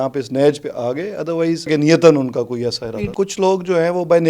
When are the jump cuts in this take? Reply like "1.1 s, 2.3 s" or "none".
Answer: 1.7 s, 3.1 s

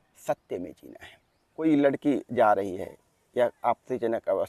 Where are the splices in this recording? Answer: 1.6 s

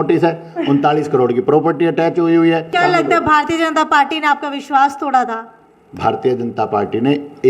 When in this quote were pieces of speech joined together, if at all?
2.7 s

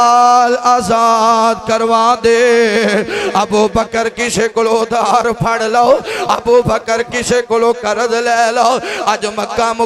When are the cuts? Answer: none

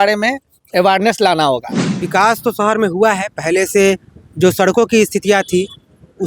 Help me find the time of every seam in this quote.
1.9 s

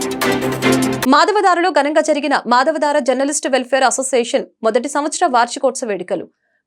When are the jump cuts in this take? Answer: none

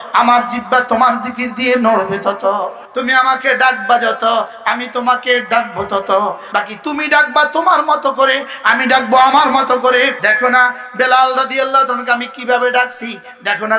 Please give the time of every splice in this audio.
2.8 s, 6.4 s, 10.2 s

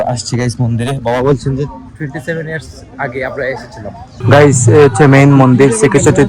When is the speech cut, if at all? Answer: 4.2 s

